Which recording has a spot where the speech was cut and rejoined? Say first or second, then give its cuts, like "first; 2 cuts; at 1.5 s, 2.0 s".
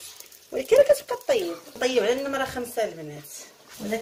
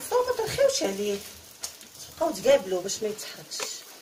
first; 1 cut; at 1.8 s